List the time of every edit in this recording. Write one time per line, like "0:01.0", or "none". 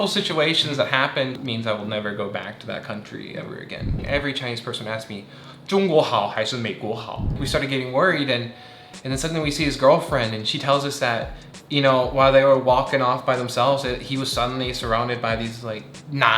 0:01.3
0:04.0
0:07.3